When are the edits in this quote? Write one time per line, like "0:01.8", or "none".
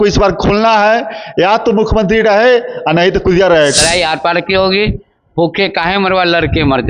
0:03.8